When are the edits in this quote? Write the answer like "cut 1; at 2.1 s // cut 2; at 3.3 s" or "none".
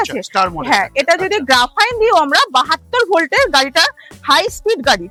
none